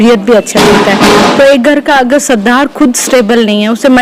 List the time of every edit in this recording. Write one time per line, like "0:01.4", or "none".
none